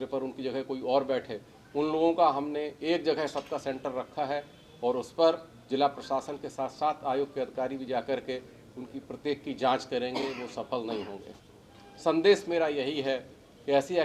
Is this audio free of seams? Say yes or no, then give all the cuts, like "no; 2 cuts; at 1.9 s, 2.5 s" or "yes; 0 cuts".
yes; 0 cuts